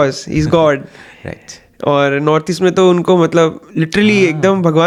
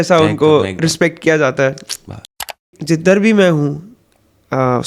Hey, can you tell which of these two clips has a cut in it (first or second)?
second